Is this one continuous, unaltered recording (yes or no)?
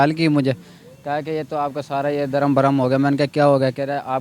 yes